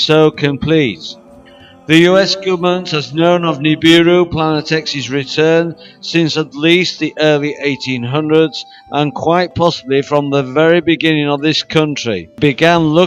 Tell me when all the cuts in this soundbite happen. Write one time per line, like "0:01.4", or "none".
0:05.0